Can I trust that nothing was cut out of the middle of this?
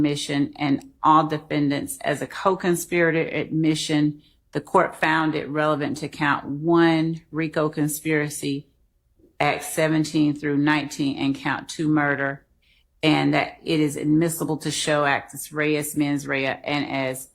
yes; 0 cuts

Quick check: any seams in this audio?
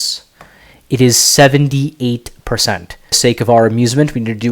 yes; 1 cut; at 3.2 s

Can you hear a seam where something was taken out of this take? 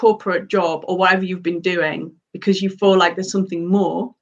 no; 0 cuts

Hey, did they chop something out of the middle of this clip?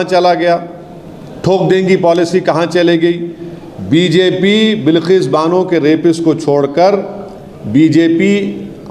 no; 0 cuts

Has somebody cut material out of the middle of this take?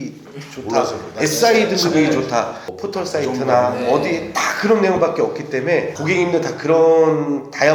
yes; 2 cuts; at 2.6 s, 5.9 s

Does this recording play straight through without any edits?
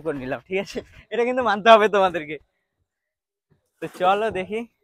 yes; 0 cuts

